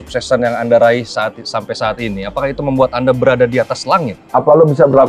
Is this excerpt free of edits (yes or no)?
no